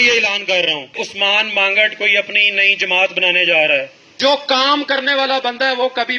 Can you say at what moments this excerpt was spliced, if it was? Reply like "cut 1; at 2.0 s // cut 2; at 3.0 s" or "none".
cut 1; at 0.9 s // cut 2; at 4.0 s